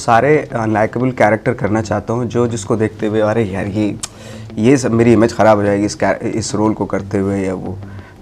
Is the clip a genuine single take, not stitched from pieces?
yes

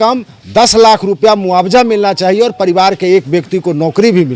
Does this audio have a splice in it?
no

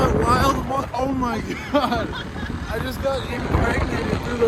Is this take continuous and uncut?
yes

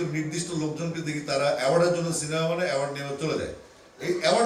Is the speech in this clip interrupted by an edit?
no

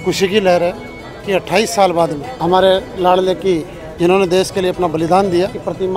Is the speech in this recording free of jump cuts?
yes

